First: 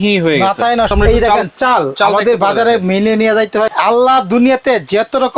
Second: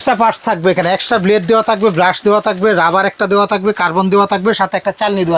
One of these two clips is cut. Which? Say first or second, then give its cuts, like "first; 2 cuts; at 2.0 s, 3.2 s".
first; 2 cuts; at 0.9 s, 3.7 s